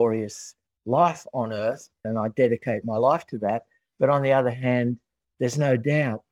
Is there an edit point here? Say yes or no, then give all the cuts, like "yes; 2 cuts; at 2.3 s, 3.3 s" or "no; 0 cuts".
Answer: yes; 1 cut; at 2.1 s